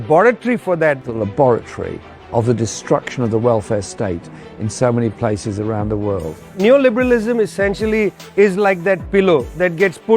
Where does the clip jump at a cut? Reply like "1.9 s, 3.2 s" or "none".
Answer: 1.1 s, 6.4 s